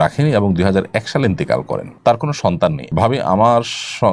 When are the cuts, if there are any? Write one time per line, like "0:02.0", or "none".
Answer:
0:01.9
0:02.9